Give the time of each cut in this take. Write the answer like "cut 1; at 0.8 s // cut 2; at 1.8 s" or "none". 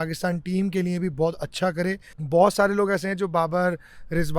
cut 1; at 2.1 s